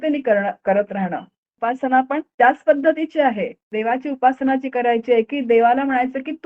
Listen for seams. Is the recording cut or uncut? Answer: cut